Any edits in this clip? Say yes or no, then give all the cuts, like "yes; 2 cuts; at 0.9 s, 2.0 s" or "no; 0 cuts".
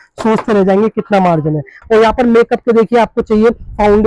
yes; 1 cut; at 1.7 s